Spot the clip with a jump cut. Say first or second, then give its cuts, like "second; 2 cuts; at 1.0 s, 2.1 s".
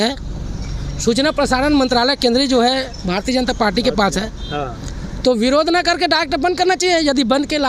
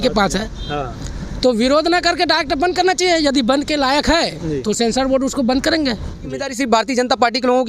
second; 1 cut; at 6.5 s